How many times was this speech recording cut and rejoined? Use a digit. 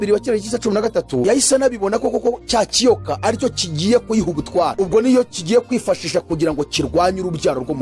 1